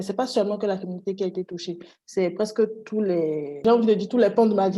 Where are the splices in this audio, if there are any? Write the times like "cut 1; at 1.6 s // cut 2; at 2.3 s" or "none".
cut 1; at 3.6 s